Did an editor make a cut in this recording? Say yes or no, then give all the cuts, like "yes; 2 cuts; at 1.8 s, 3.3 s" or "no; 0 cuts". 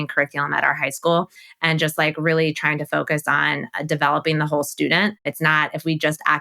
yes; 2 cuts; at 1.4 s, 5.3 s